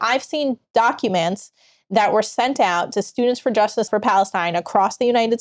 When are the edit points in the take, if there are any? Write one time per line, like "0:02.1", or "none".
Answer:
0:03.9